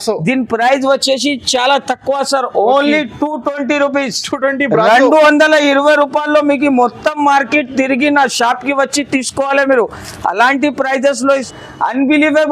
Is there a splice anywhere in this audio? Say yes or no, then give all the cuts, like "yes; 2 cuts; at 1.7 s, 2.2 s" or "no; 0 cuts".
yes; 1 cut; at 11.5 s